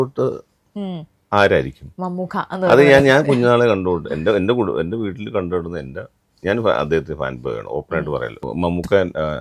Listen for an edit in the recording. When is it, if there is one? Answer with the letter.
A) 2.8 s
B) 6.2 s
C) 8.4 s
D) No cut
C